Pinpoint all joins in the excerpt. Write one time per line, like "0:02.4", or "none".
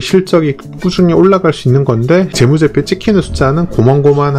0:02.3